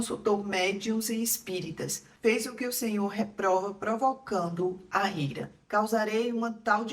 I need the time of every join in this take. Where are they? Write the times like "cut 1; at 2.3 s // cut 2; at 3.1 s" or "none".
cut 1; at 5.6 s